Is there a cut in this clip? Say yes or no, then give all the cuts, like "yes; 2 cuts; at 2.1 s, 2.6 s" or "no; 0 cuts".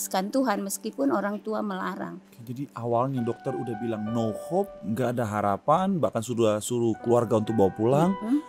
yes; 1 cut; at 2.3 s